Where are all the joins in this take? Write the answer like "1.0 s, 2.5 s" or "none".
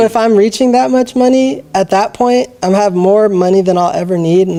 none